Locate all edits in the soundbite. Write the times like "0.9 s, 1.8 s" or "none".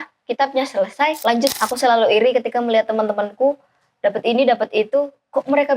1.5 s